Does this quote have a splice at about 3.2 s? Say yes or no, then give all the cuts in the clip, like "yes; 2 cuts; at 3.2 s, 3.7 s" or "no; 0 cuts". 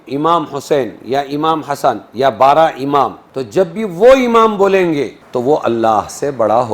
yes; 2 cuts; at 3.2 s, 5.2 s